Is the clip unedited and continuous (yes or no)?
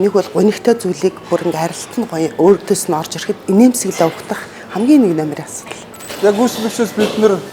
no